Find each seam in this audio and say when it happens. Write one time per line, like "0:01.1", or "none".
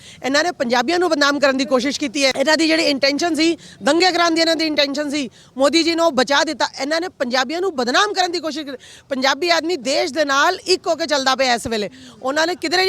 0:02.3